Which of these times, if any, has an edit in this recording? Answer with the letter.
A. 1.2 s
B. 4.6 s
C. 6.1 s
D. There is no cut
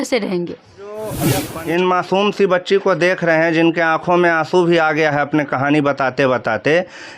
A